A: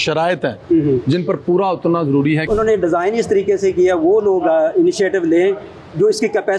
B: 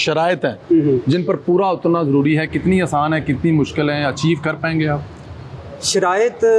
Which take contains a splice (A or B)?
A